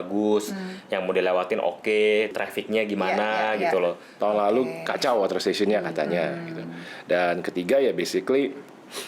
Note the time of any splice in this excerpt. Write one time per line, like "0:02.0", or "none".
0:02.3
0:04.1